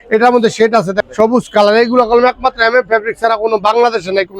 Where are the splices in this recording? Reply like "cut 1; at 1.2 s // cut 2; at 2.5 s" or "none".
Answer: cut 1; at 1.0 s